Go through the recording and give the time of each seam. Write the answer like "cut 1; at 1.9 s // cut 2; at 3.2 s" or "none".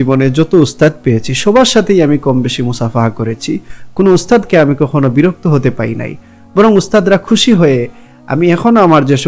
none

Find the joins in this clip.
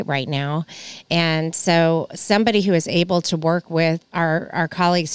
cut 1; at 4.0 s

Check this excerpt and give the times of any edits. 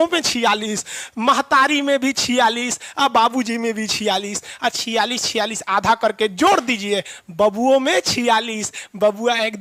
none

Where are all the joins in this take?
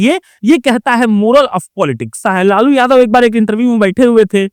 cut 1; at 2.2 s

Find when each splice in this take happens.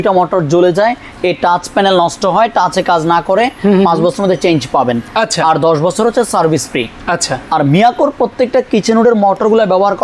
none

